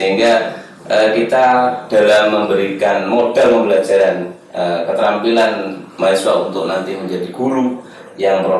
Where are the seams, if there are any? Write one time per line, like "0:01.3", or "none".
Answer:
none